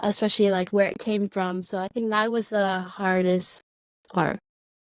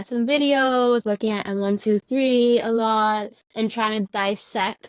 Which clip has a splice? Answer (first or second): second